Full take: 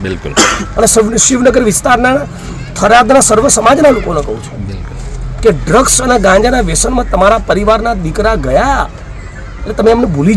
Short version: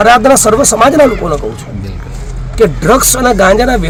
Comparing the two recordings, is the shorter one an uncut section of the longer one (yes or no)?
yes